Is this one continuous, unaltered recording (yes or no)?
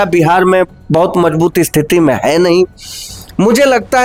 yes